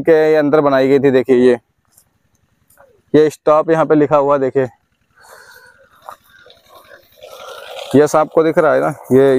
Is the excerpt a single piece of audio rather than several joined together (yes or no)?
yes